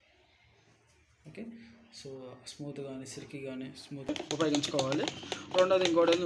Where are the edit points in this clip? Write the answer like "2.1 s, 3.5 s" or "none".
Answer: 4.1 s